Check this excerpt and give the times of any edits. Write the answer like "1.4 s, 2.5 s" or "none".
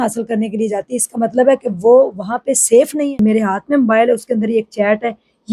3.2 s